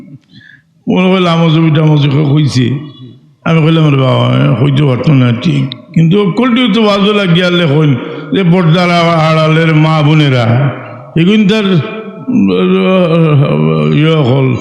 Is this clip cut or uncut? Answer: uncut